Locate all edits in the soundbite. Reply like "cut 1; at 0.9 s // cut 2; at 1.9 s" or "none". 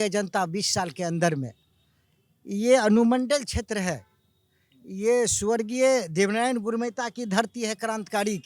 none